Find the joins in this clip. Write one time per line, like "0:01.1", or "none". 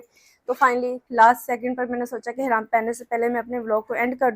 0:01.0